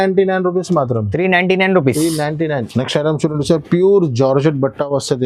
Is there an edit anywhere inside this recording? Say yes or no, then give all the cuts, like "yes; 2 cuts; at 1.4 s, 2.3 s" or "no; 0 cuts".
no; 0 cuts